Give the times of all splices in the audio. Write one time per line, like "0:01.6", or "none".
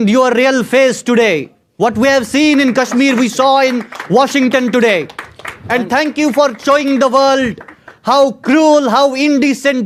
none